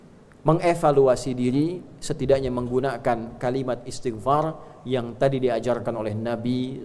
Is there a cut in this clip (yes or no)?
no